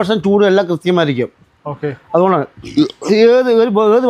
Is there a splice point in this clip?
no; 0 cuts

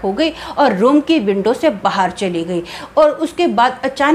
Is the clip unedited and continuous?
yes; 0 cuts

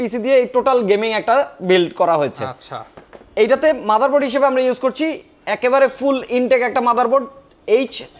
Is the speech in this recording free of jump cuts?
yes; 0 cuts

